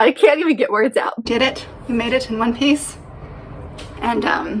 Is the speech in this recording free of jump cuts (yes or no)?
no